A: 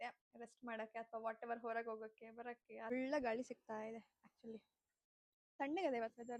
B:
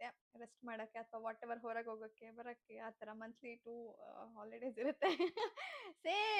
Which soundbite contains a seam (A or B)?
A